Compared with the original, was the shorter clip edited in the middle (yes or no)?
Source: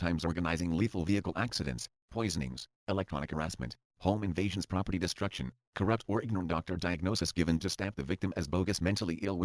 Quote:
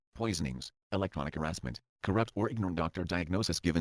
yes